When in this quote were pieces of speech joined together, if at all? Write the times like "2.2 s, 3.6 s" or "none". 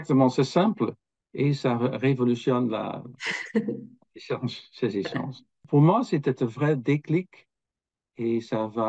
5.6 s